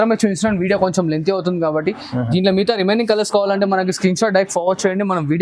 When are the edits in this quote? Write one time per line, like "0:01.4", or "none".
none